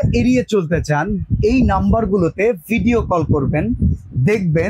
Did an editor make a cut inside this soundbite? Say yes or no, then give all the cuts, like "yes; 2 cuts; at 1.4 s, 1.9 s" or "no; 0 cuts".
no; 0 cuts